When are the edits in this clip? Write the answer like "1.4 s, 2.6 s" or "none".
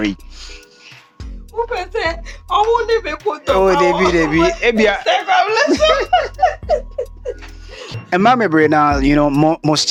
none